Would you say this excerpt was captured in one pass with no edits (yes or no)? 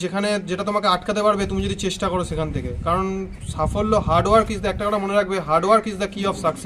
yes